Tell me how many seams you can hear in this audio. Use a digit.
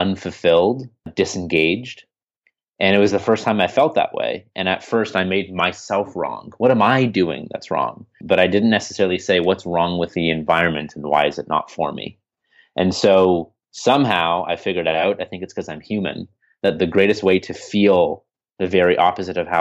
2